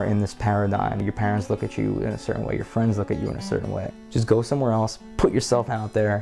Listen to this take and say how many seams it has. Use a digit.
2